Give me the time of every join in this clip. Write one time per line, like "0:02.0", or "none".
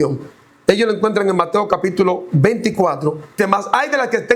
0:03.3